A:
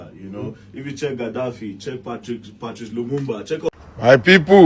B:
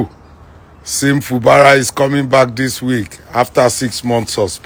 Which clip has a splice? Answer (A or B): A